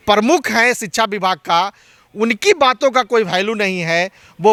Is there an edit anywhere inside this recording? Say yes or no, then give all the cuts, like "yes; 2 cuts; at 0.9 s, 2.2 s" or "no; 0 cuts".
no; 0 cuts